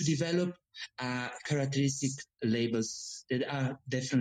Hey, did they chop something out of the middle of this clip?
no; 0 cuts

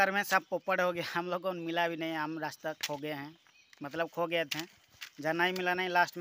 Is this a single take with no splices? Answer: yes; 0 cuts

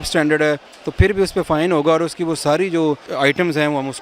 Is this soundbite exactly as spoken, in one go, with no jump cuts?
no; 1 cut; at 3.1 s

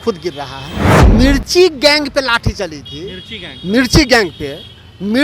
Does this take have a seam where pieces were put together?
yes; 1 cut; at 1.0 s

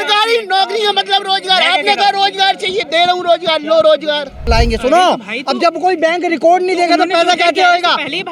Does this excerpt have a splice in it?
yes; 1 cut; at 4.5 s

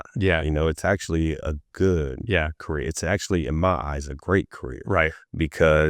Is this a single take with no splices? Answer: yes; 0 cuts

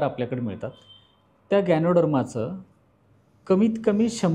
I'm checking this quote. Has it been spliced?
no; 0 cuts

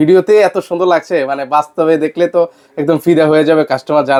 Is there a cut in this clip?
no; 0 cuts

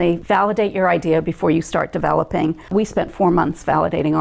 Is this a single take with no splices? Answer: no; 1 cut; at 2.6 s

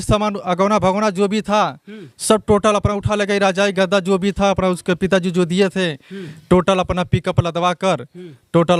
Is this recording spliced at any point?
no; 0 cuts

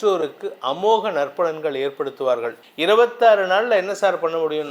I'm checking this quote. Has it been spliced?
yes; 1 cut; at 2.6 s

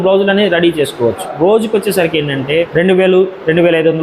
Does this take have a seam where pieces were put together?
yes; 2 cuts; at 1.3 s, 2.4 s

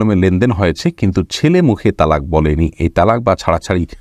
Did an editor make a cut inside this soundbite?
no; 0 cuts

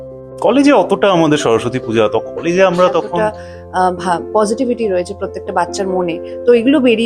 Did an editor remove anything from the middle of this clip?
yes; 1 cut; at 3.1 s

